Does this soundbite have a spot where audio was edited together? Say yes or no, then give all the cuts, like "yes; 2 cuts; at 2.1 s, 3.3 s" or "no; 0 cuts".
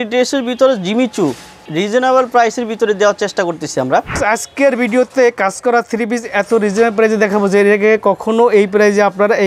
yes; 1 cut; at 4.1 s